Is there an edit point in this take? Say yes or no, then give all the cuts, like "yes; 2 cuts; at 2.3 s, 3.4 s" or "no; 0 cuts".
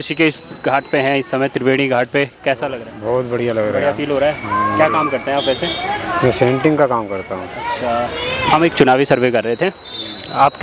no; 0 cuts